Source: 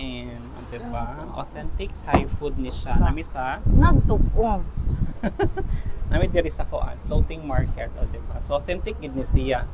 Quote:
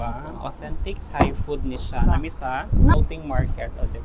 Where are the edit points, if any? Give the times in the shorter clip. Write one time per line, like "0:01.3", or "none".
0:02.9